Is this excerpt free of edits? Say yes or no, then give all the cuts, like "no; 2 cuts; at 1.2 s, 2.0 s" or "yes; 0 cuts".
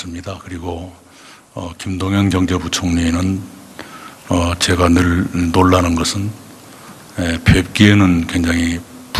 no; 1 cut; at 3.0 s